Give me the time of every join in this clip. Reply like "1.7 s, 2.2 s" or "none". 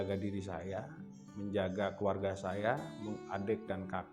none